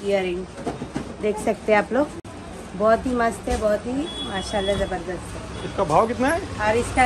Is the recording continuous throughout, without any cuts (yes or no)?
yes